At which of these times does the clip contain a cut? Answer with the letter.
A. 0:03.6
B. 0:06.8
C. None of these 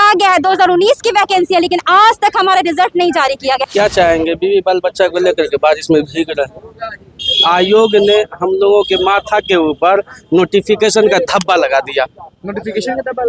A